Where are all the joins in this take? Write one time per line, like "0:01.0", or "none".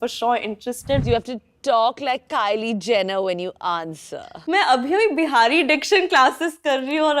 0:01.0
0:04.3

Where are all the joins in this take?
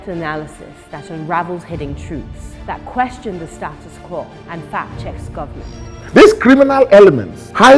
none

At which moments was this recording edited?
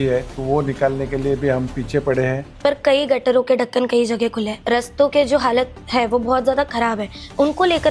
0:02.5
0:04.5

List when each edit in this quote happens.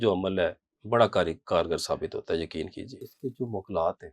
0:03.1

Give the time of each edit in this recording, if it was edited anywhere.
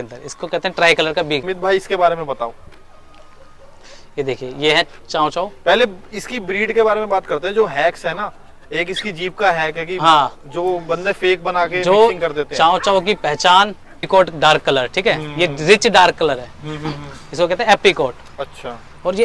0:01.4
0:14.1

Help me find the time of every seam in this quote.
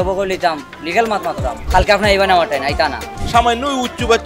0:01.6
0:03.1

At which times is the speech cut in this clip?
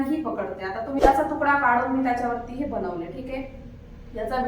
0:01.0

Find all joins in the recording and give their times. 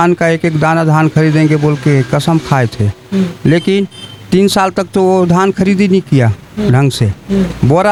none

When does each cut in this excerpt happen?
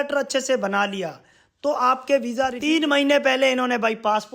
0:02.6

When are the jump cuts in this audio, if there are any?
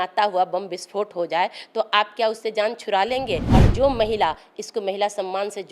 0:03.5

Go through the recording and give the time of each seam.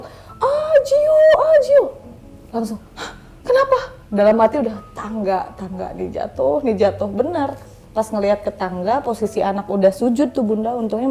none

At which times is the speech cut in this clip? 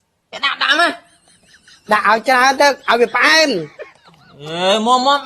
none

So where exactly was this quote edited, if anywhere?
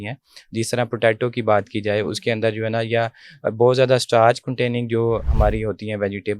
0:05.2

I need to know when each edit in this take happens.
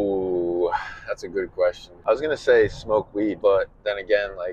0:01.9
0:03.4

